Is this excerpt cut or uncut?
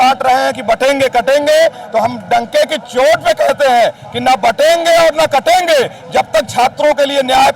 uncut